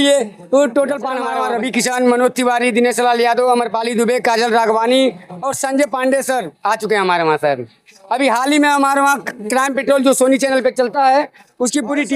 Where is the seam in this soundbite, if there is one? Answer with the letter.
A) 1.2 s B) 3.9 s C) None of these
A